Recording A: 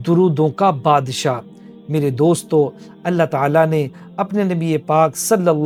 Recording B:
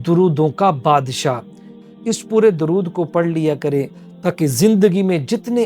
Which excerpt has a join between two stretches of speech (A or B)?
B